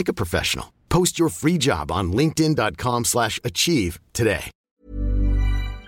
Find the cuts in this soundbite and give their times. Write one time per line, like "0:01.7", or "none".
0:04.6